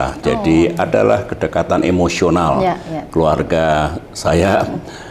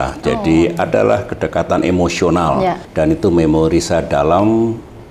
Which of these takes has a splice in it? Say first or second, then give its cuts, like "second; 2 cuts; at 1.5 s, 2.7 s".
second; 1 cut; at 2.8 s